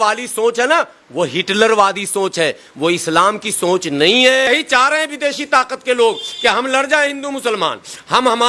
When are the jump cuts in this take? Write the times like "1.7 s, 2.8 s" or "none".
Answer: 4.5 s